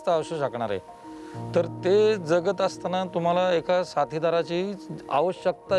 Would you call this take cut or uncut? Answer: uncut